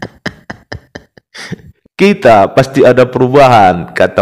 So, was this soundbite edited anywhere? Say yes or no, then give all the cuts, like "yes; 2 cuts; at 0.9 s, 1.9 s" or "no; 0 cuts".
no; 0 cuts